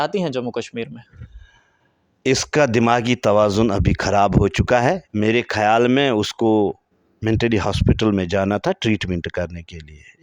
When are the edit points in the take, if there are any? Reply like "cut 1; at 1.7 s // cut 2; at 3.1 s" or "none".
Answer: none